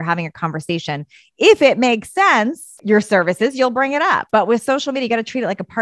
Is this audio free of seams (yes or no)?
no